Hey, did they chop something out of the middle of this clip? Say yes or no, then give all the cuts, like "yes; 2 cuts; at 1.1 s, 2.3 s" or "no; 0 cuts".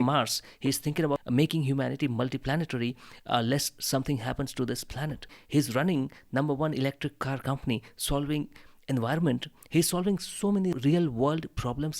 yes; 3 cuts; at 1.2 s, 5.4 s, 10.8 s